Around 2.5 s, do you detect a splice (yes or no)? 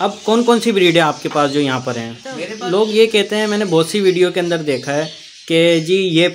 yes